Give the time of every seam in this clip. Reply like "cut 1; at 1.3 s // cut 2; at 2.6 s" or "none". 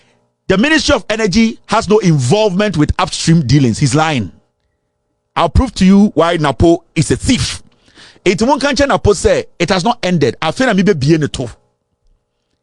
none